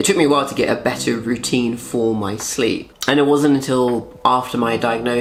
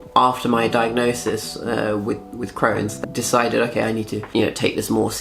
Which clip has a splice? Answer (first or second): second